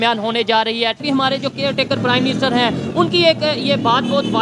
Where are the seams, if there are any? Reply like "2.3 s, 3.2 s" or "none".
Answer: 1.0 s